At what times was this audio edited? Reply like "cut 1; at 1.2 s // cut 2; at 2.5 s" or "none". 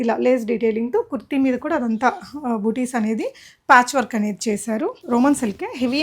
cut 1; at 5.0 s